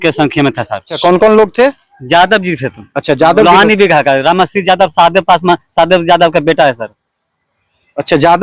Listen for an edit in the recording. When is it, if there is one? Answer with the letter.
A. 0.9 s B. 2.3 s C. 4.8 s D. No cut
A